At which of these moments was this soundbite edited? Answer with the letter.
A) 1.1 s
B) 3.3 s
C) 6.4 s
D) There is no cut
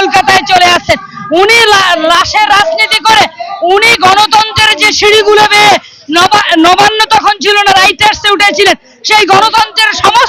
D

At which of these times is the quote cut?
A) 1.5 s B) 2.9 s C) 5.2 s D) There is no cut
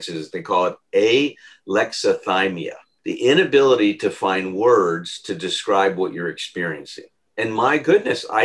B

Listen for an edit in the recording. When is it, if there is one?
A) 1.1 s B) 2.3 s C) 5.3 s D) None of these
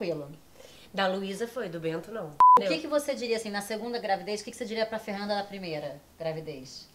B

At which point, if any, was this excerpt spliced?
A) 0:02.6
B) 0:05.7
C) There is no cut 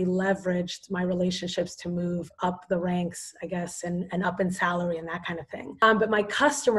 B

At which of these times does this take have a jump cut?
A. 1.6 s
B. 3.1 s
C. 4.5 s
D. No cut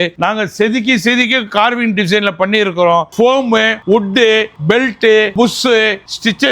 B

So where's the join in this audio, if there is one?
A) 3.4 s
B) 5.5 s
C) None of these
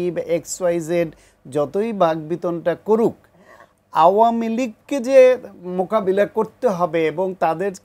C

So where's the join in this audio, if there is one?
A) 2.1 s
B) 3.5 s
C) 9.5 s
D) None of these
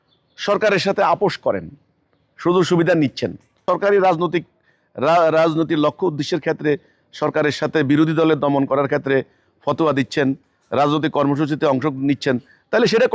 B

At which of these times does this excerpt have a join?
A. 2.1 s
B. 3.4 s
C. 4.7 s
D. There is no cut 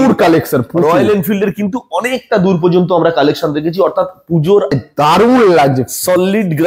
C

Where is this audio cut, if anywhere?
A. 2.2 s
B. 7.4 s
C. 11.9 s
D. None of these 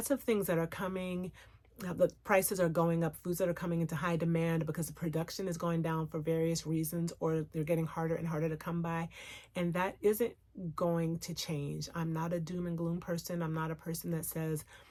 D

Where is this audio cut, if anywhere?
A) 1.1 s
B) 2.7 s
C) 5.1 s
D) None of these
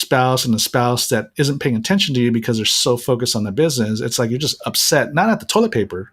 D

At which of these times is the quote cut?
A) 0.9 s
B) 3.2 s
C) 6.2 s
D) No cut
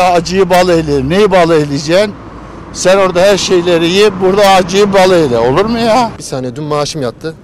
C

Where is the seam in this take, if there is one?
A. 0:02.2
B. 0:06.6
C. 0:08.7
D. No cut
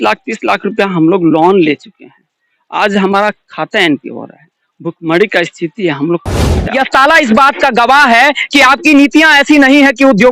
B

